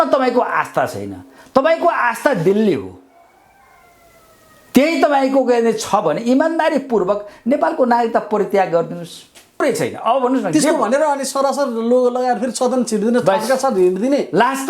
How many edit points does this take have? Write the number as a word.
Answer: one